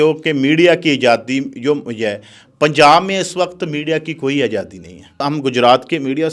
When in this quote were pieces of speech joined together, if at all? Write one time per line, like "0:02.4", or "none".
0:05.2